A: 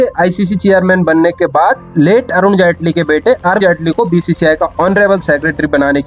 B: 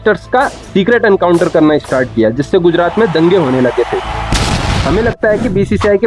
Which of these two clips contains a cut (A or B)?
B